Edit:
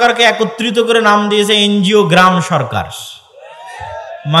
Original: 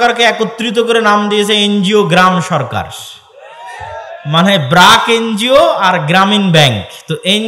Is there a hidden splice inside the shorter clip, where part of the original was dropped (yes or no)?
no